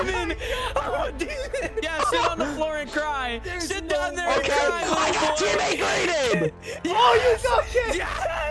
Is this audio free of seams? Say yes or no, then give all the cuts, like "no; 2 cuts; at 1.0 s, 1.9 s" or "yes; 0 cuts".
no; 1 cut; at 1.9 s